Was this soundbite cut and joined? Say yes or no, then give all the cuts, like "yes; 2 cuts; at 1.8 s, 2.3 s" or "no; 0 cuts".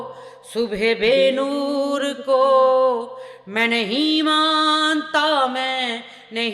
no; 0 cuts